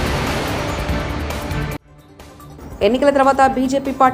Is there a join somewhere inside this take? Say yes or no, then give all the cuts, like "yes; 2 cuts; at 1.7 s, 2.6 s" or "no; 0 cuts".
no; 0 cuts